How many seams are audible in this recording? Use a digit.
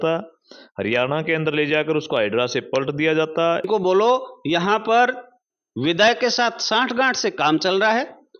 1